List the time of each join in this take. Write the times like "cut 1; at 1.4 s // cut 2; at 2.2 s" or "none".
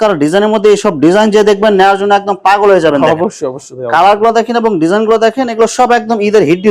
none